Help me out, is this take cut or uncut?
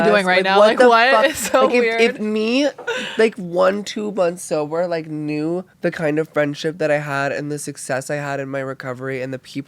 cut